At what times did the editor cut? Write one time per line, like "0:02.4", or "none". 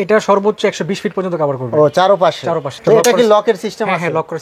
none